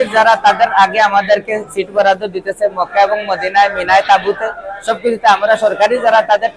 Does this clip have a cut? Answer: no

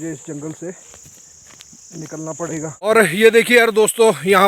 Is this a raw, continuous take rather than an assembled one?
yes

